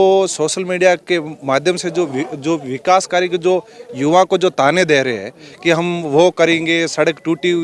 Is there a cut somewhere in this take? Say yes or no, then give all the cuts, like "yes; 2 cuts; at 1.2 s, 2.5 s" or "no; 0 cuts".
no; 0 cuts